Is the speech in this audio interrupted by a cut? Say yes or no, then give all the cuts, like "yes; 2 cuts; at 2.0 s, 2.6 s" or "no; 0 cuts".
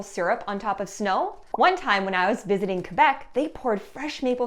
no; 0 cuts